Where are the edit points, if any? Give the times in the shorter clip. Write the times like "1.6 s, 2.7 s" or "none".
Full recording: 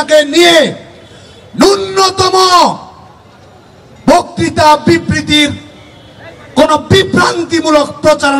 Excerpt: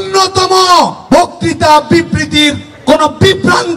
1.0 s, 2.7 s